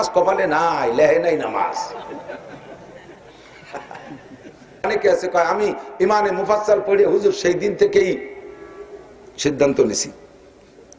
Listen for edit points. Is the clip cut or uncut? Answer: cut